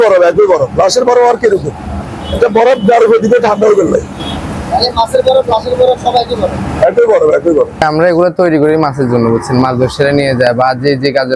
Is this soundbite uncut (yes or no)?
yes